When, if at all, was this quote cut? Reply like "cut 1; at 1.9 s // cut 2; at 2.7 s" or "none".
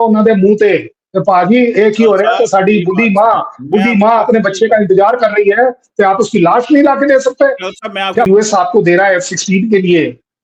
cut 1; at 8.3 s